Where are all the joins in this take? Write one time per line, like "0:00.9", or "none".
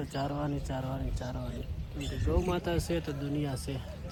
none